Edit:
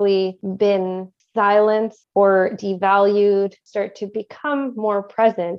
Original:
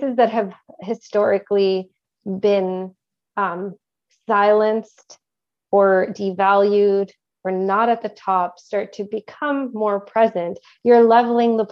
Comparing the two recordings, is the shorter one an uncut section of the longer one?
no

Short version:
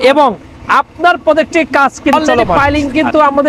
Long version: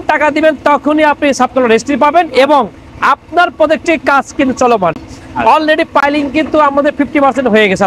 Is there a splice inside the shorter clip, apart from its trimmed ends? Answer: yes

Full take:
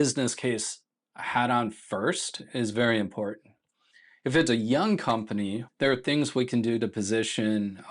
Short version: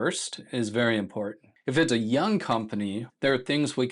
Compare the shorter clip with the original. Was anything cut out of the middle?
yes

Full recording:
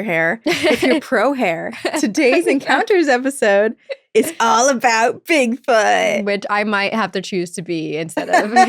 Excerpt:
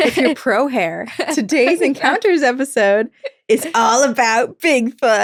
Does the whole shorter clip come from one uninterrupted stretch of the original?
yes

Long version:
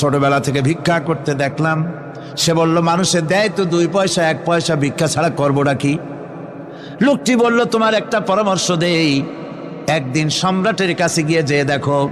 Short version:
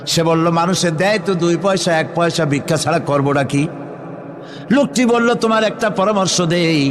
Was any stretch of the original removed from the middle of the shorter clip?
no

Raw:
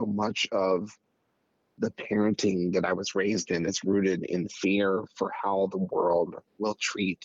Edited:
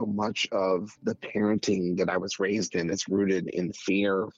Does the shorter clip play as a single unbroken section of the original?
no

